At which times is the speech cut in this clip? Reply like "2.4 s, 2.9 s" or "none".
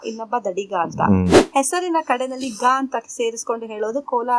1.4 s